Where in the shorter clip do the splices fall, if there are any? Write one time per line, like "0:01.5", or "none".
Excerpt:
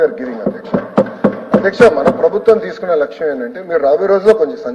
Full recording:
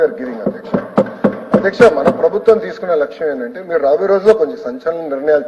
none